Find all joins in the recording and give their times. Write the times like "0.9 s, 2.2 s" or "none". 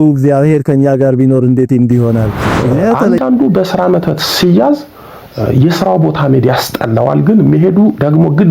3.0 s